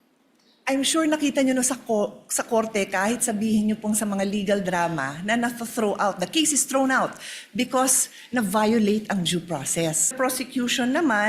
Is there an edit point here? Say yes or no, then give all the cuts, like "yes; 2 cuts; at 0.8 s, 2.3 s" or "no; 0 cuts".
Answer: yes; 1 cut; at 10.1 s